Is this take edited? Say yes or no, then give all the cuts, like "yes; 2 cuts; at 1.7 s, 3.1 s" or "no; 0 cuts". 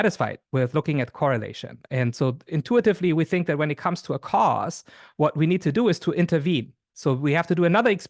no; 0 cuts